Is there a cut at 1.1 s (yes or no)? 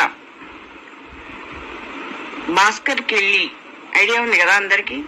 yes